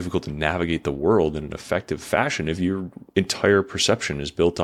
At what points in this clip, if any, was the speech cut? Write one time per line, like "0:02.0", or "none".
none